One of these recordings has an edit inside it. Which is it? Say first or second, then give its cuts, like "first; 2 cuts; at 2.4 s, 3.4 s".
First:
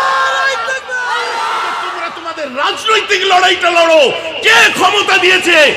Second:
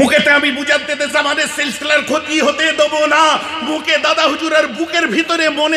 first; 1 cut; at 2.1 s